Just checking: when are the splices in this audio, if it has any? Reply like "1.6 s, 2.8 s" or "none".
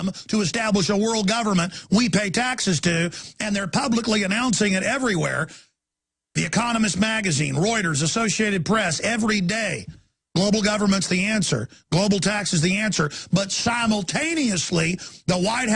none